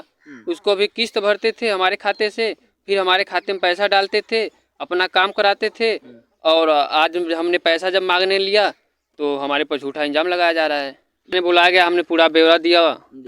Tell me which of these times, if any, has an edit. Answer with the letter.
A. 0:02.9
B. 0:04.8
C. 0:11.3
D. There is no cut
C